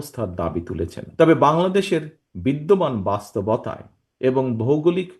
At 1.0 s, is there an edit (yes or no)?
yes